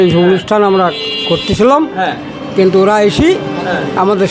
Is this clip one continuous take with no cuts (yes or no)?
yes